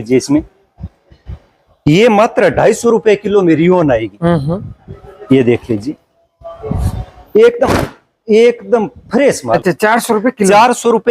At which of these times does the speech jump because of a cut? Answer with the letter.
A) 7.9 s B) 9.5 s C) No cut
B